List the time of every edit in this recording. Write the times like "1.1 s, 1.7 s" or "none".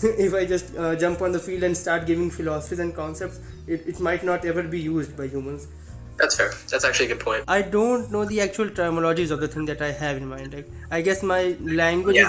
7.4 s

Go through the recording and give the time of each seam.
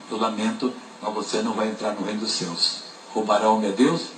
2.7 s

